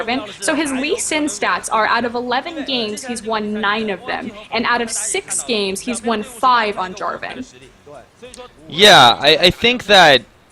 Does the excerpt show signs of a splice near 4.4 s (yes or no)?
no